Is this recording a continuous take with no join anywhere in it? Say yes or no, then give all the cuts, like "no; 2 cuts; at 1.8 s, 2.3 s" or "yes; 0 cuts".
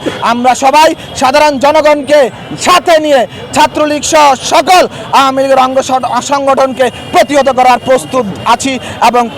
yes; 0 cuts